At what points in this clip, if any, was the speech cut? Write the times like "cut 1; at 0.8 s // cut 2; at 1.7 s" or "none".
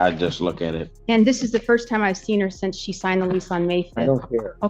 cut 1; at 0.9 s